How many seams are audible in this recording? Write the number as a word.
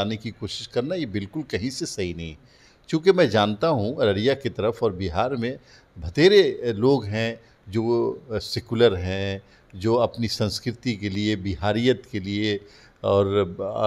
zero